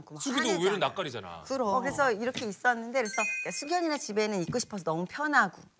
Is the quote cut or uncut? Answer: cut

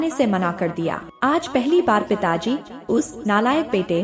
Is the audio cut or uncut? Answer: cut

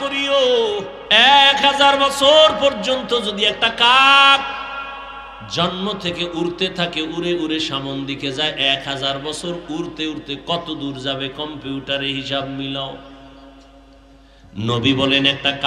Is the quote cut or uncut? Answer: cut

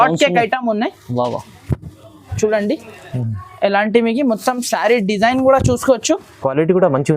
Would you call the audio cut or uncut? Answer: uncut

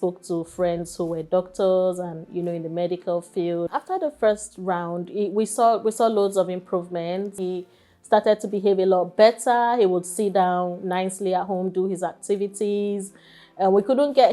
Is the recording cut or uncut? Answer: cut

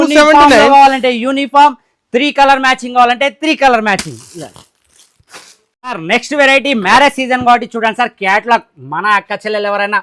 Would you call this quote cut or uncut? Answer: uncut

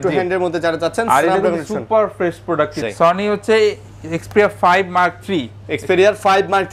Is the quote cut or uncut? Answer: cut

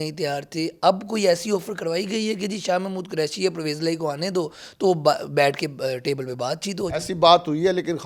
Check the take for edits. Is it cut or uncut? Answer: uncut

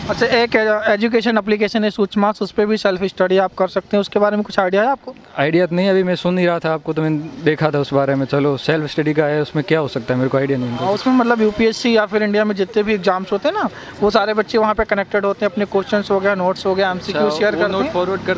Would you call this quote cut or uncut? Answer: uncut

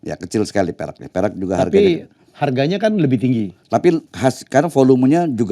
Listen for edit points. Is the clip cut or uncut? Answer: cut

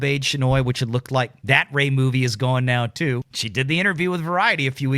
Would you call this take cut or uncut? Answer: cut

